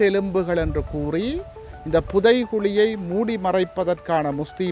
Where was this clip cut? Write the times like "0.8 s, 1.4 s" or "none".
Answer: none